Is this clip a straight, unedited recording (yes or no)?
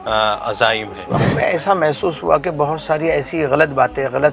no